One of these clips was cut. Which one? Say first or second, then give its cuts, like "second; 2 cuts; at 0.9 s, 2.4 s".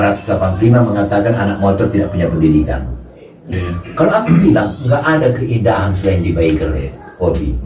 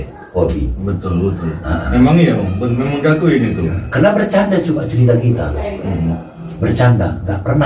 first; 1 cut; at 3.5 s